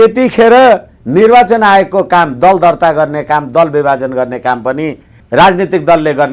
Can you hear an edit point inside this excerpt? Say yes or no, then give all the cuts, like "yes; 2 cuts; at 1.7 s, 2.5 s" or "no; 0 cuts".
yes; 1 cut; at 5.2 s